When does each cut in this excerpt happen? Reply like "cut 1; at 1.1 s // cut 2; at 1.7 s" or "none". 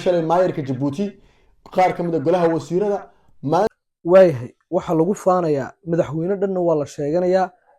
cut 1; at 3.7 s